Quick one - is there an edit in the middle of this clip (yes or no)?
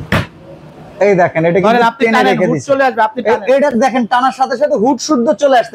no